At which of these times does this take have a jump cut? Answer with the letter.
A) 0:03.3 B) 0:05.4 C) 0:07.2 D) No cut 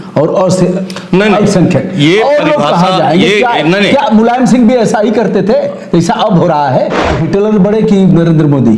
C